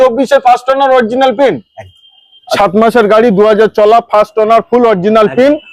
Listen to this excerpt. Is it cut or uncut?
cut